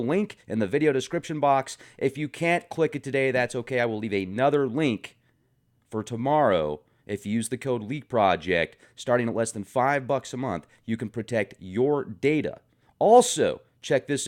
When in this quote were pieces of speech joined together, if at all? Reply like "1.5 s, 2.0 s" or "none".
2.2 s